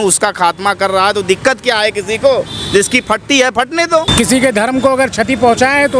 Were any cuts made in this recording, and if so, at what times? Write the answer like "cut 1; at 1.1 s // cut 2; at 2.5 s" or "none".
cut 1; at 4.1 s